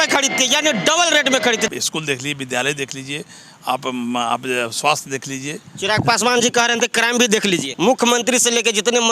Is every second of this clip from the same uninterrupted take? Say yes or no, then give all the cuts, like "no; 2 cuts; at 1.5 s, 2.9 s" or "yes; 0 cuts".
no; 2 cuts; at 1.7 s, 7.7 s